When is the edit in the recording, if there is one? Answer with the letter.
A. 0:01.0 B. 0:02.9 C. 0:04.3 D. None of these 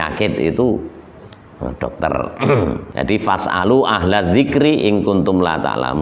B